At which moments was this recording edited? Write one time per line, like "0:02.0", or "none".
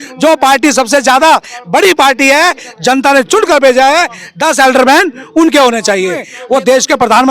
0:06.3